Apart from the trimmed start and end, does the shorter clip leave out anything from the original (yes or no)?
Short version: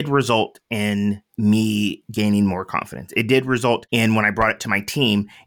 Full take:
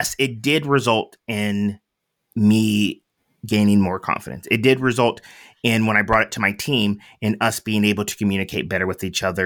yes